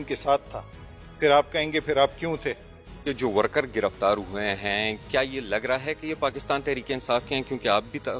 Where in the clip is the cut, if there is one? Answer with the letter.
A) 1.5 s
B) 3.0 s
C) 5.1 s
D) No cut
B